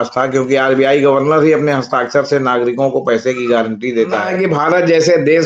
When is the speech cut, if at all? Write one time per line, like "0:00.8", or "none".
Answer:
0:04.3